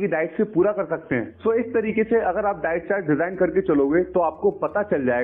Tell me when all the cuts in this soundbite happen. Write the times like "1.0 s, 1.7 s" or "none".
1.3 s